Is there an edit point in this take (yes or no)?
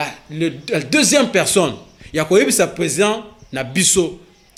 no